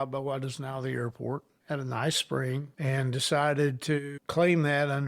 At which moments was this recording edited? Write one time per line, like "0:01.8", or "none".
0:01.5
0:02.7
0:04.2